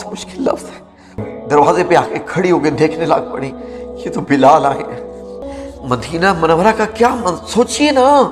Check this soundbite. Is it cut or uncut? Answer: cut